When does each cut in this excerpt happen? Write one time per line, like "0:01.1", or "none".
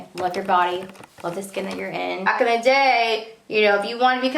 0:02.3